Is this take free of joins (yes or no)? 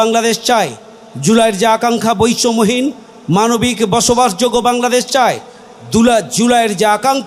yes